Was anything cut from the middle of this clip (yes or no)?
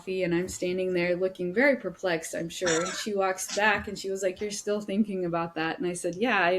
no